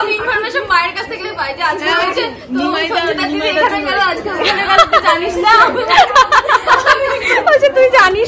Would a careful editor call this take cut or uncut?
uncut